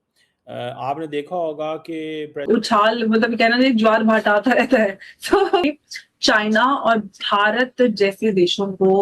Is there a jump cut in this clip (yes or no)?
yes